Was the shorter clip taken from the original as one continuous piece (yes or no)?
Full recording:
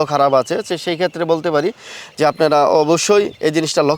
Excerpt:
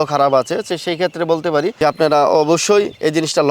no